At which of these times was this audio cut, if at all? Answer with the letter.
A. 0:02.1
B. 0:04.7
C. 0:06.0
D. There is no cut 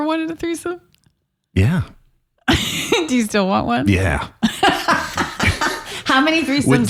D